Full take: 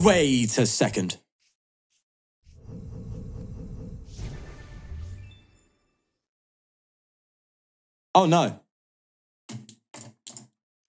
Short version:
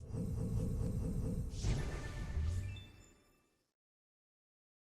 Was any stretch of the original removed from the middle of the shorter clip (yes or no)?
no